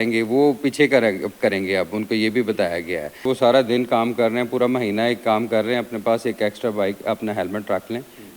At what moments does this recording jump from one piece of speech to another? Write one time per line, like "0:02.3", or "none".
0:03.2